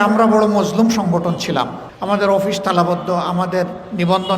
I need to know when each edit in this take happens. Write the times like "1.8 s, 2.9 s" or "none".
1.9 s